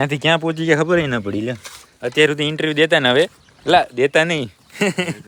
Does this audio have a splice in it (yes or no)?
no